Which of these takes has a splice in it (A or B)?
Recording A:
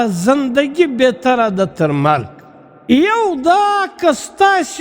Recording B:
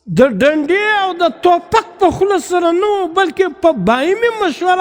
A